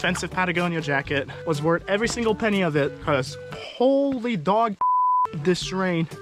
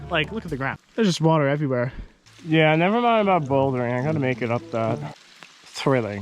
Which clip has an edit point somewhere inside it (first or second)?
second